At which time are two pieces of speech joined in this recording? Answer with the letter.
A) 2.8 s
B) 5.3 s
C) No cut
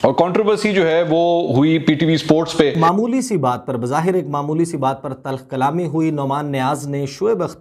A